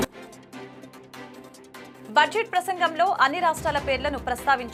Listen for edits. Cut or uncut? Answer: uncut